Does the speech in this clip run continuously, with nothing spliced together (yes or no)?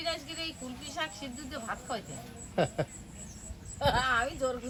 yes